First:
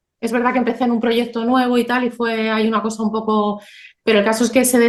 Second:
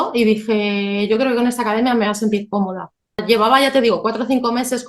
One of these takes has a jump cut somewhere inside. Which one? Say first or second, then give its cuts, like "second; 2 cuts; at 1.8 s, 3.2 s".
second; 1 cut; at 3.2 s